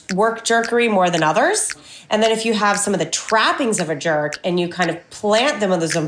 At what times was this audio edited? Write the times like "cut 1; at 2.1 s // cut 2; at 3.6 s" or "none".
cut 1; at 1.9 s